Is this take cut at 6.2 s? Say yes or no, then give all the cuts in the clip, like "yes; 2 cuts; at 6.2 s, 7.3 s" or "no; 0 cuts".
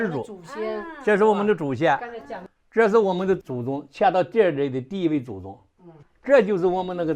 no; 0 cuts